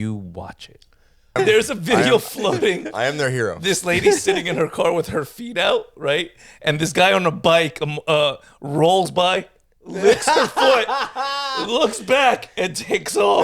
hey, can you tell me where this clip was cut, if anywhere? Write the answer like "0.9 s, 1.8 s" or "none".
1.3 s